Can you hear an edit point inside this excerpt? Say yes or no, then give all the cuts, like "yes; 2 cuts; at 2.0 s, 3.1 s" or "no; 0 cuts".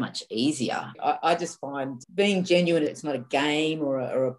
yes; 3 cuts; at 0.9 s, 2.0 s, 2.9 s